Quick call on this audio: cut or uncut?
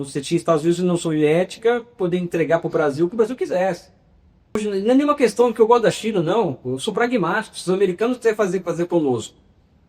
cut